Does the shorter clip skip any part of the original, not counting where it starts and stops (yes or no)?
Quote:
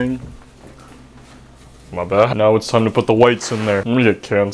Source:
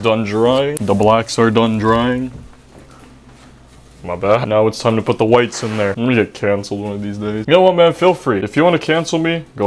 no